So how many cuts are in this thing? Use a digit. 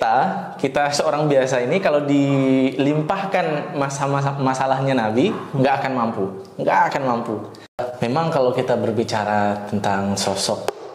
1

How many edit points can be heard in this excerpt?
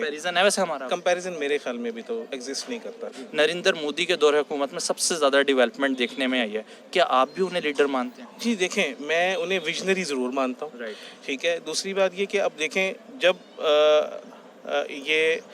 1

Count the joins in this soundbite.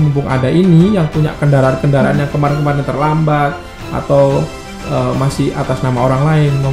0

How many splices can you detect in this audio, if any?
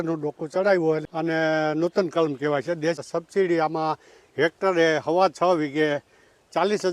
2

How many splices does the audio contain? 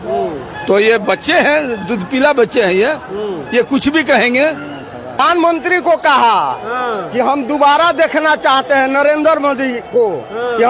1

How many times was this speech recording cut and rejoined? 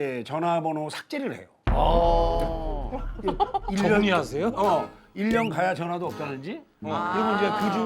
1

